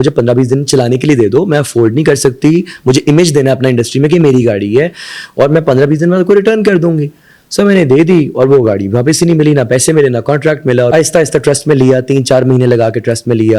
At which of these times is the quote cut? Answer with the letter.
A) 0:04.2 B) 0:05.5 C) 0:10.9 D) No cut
C